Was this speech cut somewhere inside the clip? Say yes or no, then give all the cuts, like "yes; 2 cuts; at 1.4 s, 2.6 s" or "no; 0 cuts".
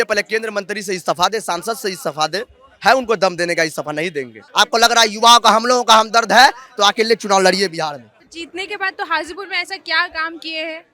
yes; 2 cuts; at 4.4 s, 8.1 s